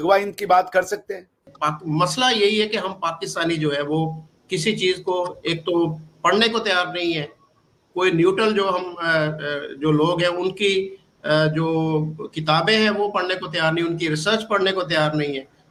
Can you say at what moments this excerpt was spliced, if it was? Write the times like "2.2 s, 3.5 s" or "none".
none